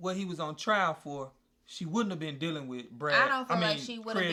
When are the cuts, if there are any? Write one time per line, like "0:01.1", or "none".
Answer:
none